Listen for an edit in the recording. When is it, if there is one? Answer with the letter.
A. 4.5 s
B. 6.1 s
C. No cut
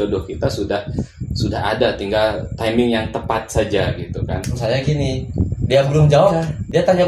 A